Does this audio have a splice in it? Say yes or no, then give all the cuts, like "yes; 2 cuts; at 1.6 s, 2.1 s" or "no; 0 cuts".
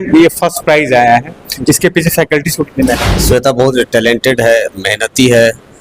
yes; 1 cut; at 3.1 s